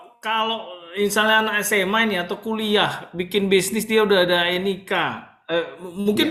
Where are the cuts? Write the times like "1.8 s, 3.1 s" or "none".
none